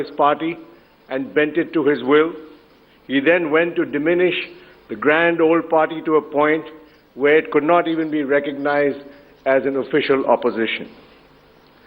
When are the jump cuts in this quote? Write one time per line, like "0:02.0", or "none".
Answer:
0:09.9

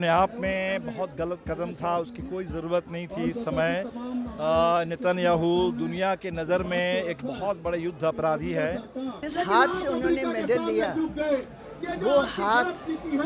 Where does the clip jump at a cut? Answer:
0:09.2

